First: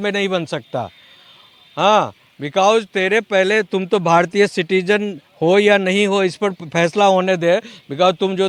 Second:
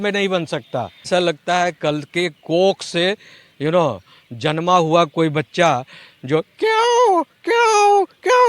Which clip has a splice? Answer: second; 1 cut; at 1.0 s

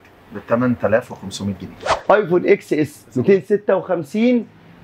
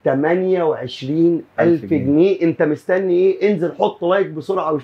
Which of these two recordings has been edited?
first; 1 cut; at 2.0 s

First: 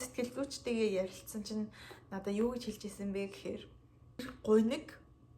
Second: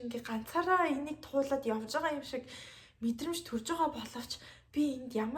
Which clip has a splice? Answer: first; 1 cut; at 4.2 s

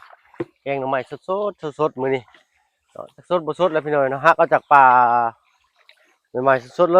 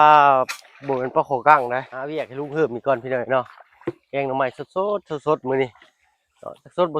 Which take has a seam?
second; 1 cut; at 2.1 s

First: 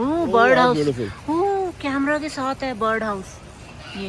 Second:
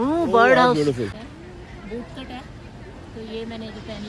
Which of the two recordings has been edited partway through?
second; 1 cut; at 1.2 s

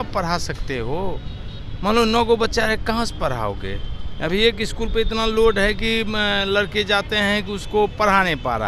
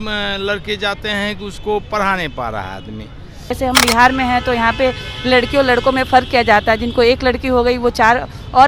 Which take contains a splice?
second; 1 cut; at 3.6 s

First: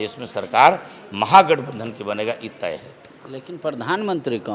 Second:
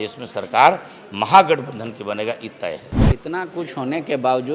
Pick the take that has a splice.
second; 1 cut; at 3.0 s

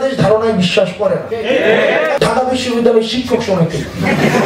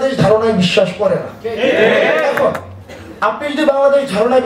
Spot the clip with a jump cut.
first; 2 cuts; at 1.3 s, 2.2 s

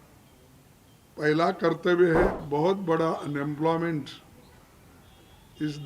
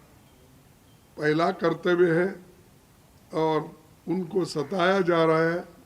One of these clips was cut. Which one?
first; 1 cut; at 2.4 s

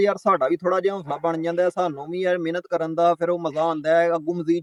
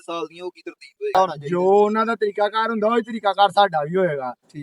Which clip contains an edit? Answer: second; 1 cut; at 1.1 s

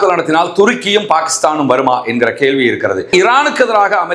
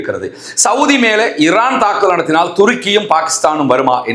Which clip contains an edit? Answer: first; 1 cut; at 3.0 s

